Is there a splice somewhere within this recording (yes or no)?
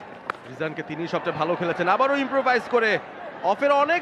no